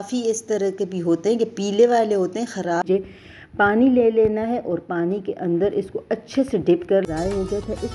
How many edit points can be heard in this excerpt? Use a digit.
2